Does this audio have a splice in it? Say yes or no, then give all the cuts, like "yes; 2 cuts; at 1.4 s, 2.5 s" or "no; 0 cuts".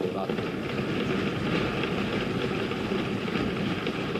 no; 0 cuts